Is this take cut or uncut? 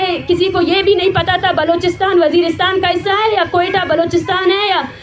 uncut